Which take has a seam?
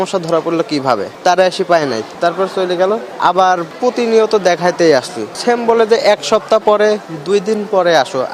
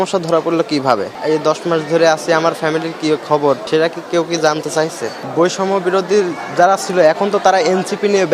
second; 2 cuts; at 1.1 s, 5.2 s

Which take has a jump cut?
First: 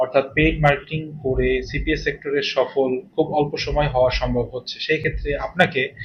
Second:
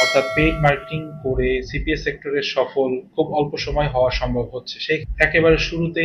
second; 1 cut; at 5.1 s

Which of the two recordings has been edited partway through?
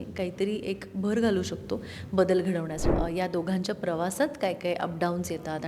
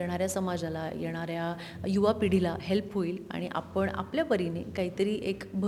first; 1 cut; at 2.8 s

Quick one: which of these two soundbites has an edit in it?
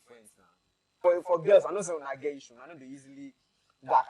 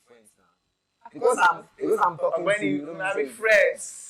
first; 1 cut; at 1.0 s

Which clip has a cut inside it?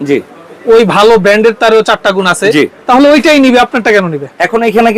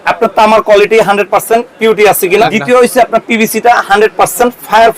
second; 1 cut; at 2.5 s

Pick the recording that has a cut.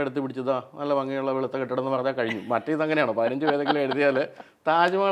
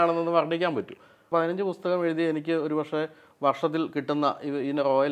second; 1 cut; at 1.3 s

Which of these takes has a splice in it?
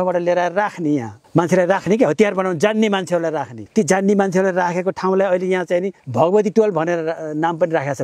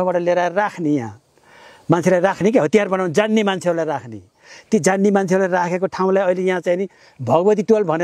first; 3 cuts; at 1.2 s, 3.5 s, 6.0 s

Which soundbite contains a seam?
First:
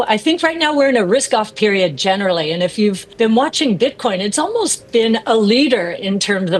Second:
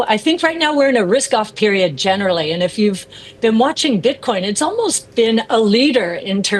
first; 1 cut; at 3.0 s

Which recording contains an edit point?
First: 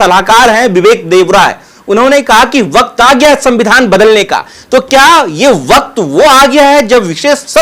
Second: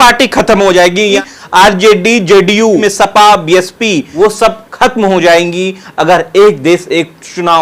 second; 3 cuts; at 1.2 s, 2.8 s, 4.0 s

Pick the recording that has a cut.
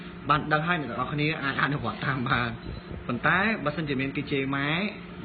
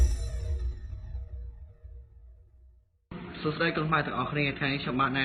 first; 1 cut; at 2.3 s

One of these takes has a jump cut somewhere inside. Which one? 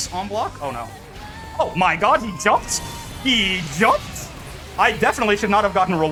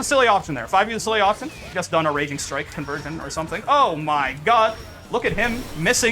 second; 1 cut; at 1.7 s

